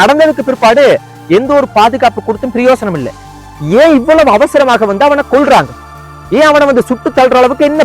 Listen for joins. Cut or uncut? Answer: cut